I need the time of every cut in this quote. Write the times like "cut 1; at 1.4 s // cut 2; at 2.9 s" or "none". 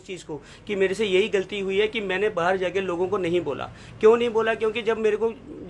none